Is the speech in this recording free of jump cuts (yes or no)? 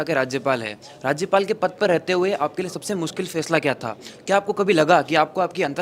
yes